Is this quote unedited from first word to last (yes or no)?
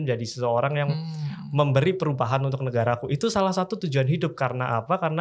yes